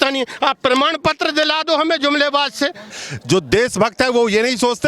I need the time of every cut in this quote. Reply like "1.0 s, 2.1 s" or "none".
2.9 s